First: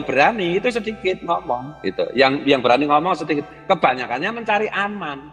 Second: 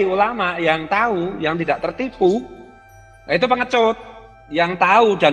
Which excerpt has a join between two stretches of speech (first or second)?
second